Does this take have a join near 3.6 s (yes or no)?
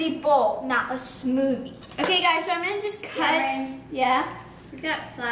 no